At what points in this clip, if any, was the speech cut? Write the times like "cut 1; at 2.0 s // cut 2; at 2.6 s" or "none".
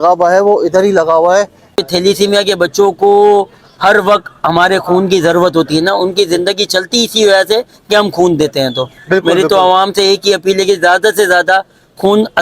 cut 1; at 1.8 s